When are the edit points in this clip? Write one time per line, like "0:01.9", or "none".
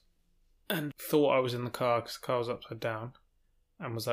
0:00.9